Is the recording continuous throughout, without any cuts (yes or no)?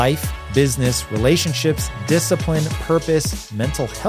yes